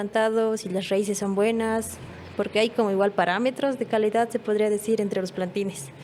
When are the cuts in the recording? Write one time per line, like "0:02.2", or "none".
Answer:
none